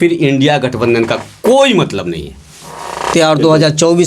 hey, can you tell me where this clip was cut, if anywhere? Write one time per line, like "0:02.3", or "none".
0:03.1